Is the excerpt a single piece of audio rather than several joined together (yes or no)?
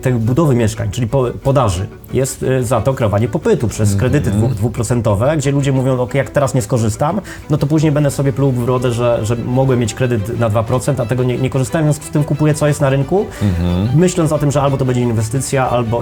yes